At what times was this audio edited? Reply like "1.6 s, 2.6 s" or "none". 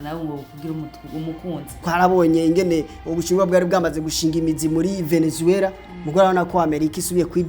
1.8 s